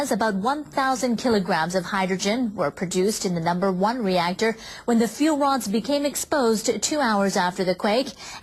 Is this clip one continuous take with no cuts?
yes; 0 cuts

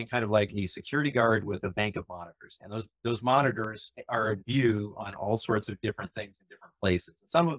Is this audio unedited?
yes; 0 cuts

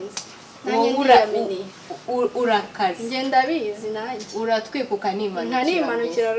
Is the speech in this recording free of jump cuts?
yes; 0 cuts

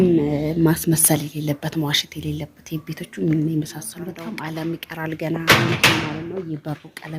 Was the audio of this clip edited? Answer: yes; 1 cut; at 4.2 s

